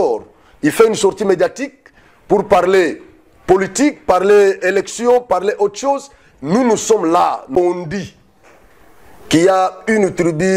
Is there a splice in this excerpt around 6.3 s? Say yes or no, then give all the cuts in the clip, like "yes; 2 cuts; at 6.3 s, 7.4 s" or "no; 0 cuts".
no; 1 cut; at 7.5 s